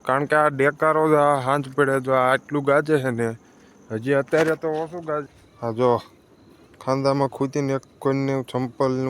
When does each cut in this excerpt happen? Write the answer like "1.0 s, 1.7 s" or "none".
5.3 s